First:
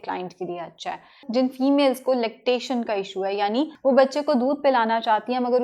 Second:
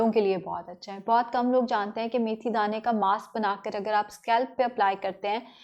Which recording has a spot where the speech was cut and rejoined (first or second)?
first